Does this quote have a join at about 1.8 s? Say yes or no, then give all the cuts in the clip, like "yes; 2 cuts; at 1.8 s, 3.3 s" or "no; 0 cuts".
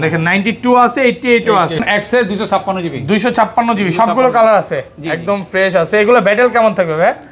yes; 1 cut; at 1.8 s